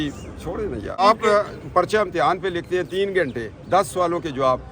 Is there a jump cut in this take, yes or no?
yes